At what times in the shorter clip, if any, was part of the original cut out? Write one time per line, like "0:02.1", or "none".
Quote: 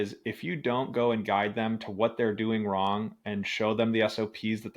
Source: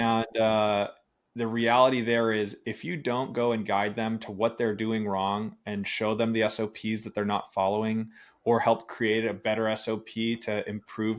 none